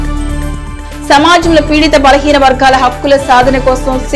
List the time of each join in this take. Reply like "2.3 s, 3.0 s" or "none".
1.0 s